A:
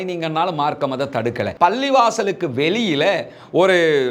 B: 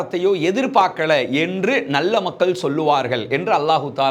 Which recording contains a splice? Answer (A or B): A